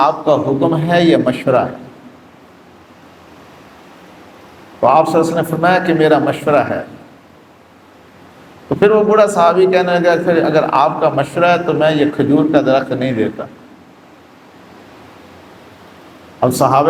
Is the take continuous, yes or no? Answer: yes